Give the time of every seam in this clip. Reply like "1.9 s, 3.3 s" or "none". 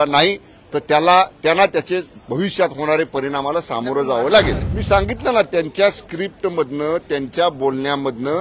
4.6 s